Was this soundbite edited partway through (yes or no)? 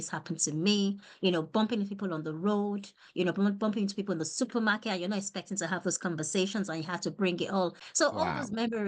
yes